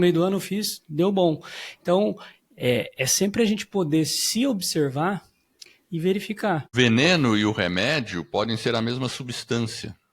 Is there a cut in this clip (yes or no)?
yes